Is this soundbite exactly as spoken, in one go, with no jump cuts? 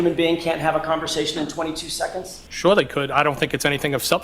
no; 1 cut; at 2.4 s

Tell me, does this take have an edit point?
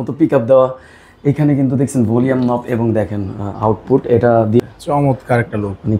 yes; 1 cut; at 4.6 s

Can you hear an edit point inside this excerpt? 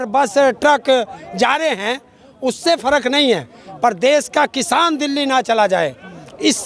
no; 0 cuts

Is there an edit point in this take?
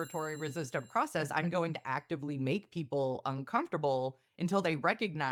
no; 0 cuts

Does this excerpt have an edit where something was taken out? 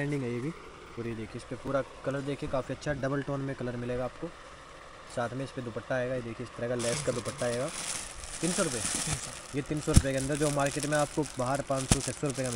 no; 0 cuts

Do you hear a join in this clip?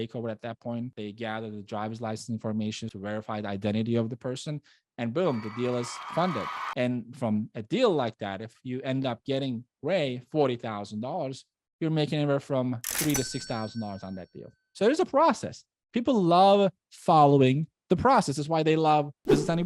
yes; 3 cuts; at 0.9 s, 2.9 s, 14.6 s

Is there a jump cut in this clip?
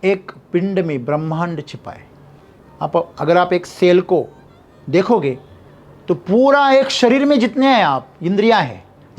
no; 0 cuts

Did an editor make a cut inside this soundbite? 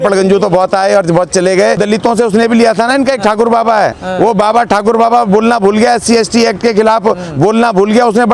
yes; 1 cut; at 1.8 s

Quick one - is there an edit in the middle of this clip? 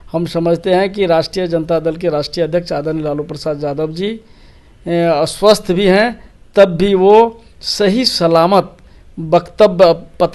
no; 0 cuts

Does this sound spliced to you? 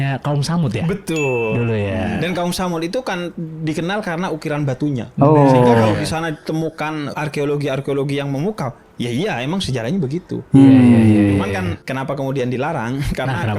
no; 0 cuts

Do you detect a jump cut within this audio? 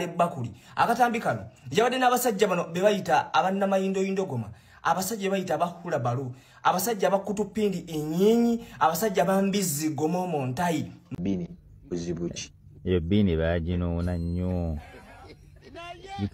yes; 1 cut; at 11.0 s

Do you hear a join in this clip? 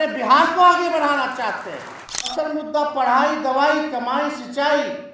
yes; 1 cut; at 2.4 s

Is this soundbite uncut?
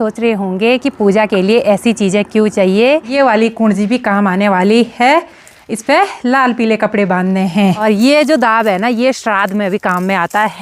no; 2 cuts; at 3.1 s, 7.8 s

